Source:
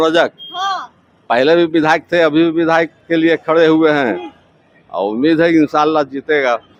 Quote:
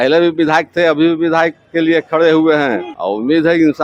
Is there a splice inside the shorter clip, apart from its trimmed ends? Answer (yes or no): yes